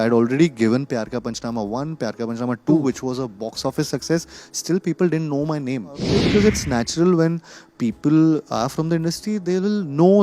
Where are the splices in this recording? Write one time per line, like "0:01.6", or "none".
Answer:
0:06.1